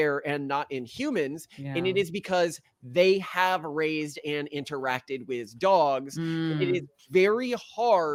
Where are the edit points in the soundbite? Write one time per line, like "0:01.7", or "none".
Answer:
none